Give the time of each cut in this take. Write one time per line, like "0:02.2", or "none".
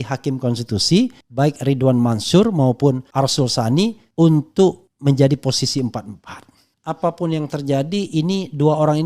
0:01.2
0:03.0
0:04.0
0:04.9
0:06.8